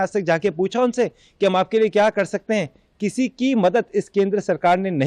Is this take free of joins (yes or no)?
yes